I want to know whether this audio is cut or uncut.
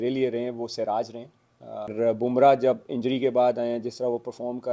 cut